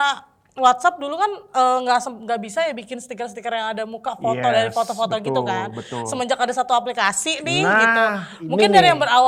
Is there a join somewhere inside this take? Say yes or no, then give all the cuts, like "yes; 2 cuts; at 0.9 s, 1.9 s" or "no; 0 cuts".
no; 0 cuts